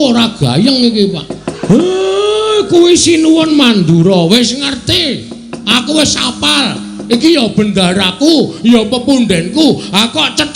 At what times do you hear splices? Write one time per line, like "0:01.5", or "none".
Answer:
0:01.5